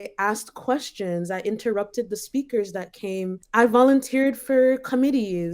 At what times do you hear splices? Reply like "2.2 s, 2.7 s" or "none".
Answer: 3.4 s